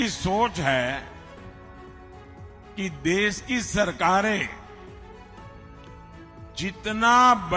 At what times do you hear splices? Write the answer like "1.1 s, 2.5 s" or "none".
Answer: none